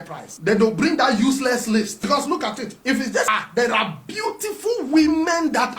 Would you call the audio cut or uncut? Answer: cut